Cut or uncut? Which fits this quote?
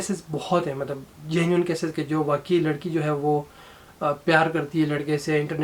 uncut